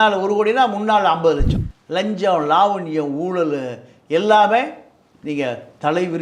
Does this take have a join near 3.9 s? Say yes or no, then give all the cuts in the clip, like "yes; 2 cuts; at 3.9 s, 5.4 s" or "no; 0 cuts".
no; 1 cut; at 1.5 s